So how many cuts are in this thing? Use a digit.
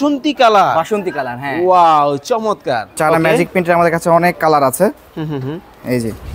1